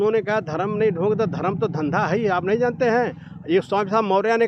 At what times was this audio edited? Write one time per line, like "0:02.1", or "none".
none